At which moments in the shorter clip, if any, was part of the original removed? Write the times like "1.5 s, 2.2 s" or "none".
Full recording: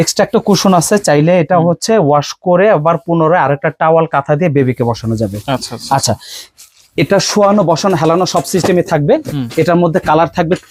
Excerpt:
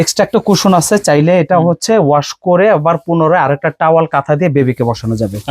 none